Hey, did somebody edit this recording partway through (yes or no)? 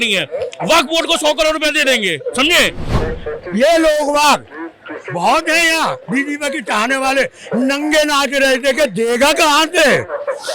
yes